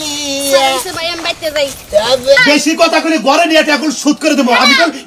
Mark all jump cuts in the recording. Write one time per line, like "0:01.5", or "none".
0:02.4